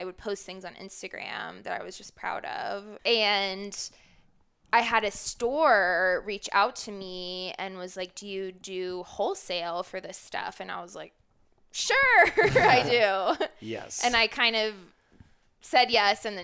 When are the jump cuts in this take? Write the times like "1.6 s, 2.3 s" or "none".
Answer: 2.9 s